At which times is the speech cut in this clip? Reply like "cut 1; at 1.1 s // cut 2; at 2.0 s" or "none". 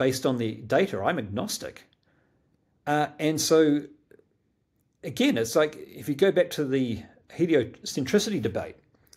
none